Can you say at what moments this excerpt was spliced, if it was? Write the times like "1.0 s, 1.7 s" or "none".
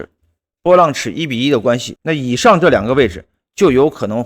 1.9 s